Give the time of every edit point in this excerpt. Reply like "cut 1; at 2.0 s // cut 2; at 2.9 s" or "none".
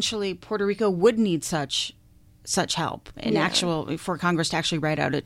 none